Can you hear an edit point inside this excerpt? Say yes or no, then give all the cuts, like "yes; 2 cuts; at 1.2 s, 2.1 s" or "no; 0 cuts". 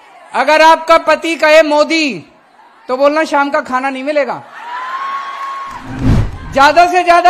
yes; 1 cut; at 6.1 s